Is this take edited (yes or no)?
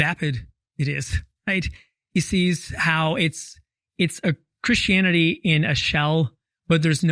no